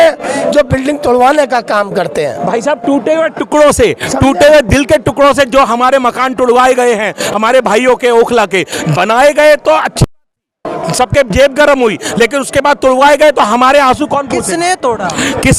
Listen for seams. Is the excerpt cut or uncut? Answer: uncut